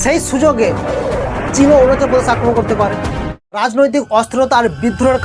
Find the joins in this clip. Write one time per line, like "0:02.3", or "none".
0:03.6